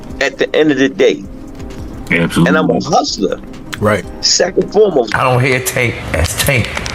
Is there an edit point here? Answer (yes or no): yes